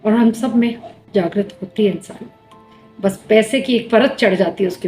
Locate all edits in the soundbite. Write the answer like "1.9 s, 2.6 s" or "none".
0.9 s